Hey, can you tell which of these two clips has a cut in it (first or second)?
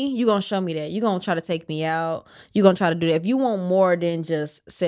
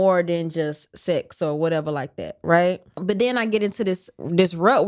second